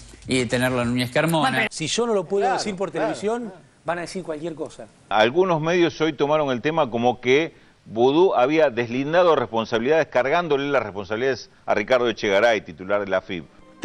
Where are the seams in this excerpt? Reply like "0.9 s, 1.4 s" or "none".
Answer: 1.7 s, 5.1 s